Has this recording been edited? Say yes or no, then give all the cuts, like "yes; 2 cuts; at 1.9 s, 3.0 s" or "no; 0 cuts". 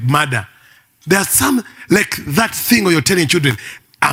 no; 0 cuts